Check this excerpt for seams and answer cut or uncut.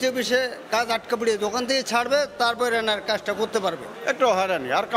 cut